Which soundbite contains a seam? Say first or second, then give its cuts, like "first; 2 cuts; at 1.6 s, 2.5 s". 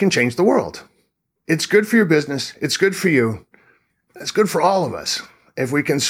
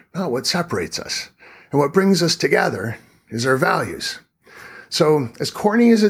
first; 1 cut; at 1.3 s